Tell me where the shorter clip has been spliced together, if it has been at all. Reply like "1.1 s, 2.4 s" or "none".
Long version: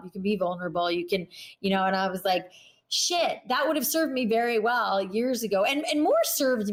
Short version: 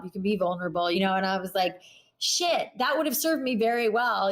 1.0 s